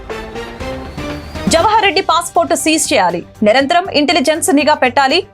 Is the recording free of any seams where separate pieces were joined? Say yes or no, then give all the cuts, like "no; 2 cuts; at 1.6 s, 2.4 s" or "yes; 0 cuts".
no; 1 cut; at 1.4 s